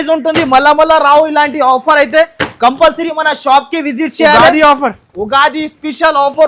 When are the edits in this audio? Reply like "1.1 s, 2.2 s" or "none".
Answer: none